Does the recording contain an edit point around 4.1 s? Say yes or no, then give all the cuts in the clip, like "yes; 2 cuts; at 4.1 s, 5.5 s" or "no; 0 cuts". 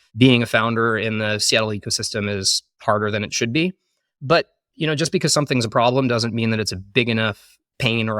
no; 0 cuts